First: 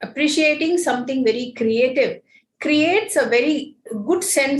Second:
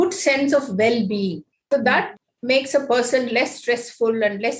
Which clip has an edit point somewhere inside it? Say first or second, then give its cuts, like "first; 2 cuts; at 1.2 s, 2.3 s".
second; 1 cut; at 1.5 s